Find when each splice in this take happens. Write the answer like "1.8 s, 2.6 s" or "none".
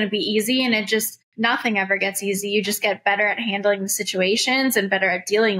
1.2 s